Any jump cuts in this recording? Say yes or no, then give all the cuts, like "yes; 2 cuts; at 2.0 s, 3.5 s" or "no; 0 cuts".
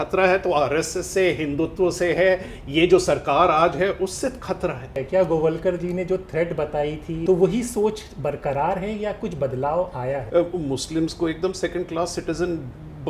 yes; 3 cuts; at 4.9 s, 7.2 s, 10.2 s